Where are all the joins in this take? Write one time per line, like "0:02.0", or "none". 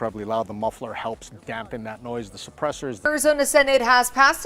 0:03.0